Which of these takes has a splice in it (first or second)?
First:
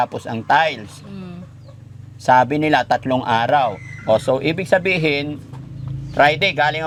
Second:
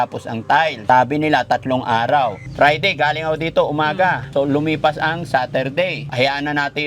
second